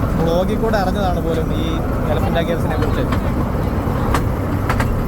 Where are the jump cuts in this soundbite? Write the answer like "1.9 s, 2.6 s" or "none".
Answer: none